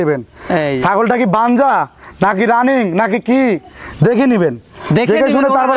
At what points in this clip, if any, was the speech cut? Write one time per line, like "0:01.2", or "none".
none